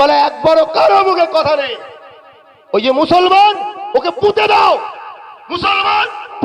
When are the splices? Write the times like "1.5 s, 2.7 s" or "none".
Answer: none